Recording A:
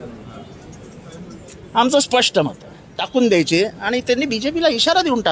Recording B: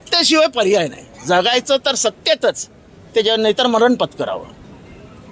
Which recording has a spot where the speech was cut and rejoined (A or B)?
A